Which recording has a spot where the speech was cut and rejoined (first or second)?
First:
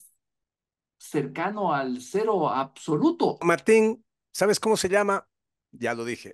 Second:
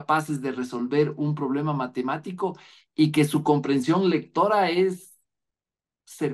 first